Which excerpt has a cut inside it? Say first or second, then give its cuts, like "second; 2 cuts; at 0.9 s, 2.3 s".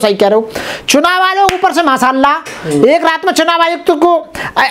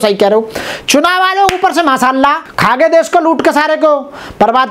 second; 1 cut; at 2.5 s